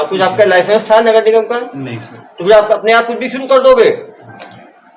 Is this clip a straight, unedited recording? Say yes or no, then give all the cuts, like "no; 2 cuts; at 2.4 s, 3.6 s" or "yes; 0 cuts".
yes; 0 cuts